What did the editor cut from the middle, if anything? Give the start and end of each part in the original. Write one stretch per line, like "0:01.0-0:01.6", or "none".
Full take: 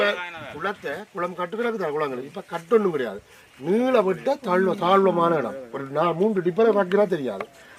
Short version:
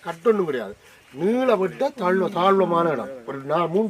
none